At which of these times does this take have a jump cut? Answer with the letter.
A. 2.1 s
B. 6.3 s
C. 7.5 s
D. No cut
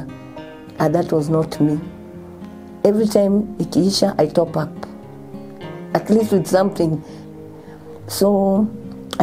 D